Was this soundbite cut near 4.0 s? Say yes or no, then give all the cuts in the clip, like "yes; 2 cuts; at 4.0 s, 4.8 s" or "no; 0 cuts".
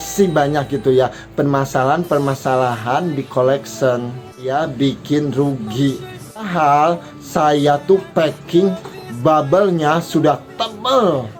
no; 0 cuts